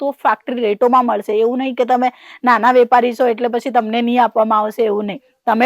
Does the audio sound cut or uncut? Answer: uncut